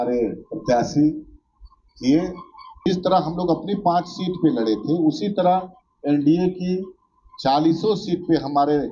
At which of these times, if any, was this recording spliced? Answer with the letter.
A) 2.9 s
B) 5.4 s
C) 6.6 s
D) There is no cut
A